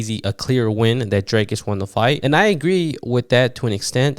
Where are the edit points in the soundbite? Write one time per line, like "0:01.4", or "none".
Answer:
0:02.2